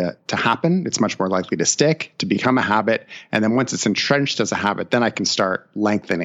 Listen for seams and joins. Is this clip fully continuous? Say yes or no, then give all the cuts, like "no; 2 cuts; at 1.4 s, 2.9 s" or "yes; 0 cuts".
yes; 0 cuts